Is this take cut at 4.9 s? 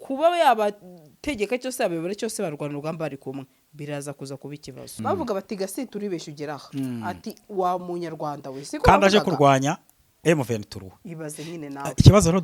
yes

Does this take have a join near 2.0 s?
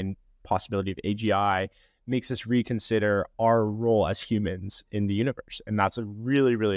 no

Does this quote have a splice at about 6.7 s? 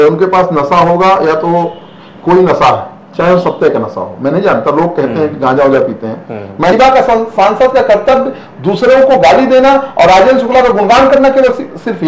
yes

